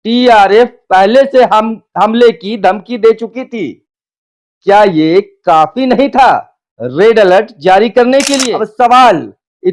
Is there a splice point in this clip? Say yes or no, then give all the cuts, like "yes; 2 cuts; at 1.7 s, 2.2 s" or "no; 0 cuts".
yes; 1 cut; at 8.6 s